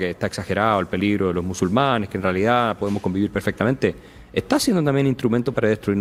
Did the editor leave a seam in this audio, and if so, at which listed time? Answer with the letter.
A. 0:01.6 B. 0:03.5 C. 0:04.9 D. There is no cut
D